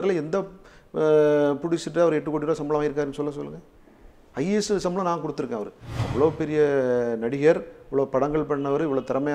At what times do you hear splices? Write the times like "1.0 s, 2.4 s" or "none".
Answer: 5.9 s